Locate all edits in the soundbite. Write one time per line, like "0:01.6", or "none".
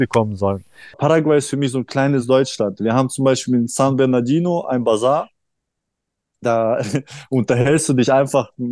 0:00.9